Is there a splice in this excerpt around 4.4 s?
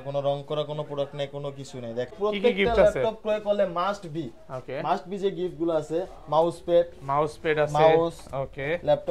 no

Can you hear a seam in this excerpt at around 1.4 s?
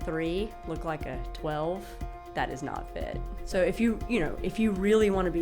no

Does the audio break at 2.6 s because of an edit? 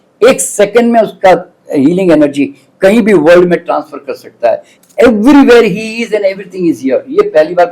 no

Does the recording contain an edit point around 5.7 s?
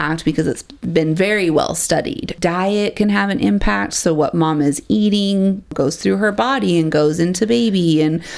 yes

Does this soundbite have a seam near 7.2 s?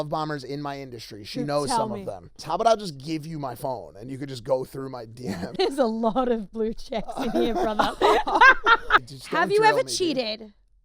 no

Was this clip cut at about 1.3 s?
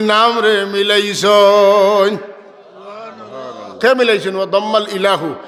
no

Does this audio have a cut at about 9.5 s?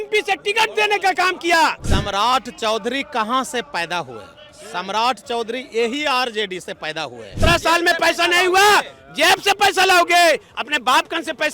no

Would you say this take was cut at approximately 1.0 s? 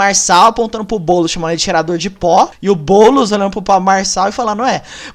no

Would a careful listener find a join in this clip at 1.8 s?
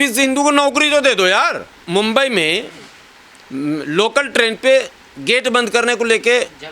yes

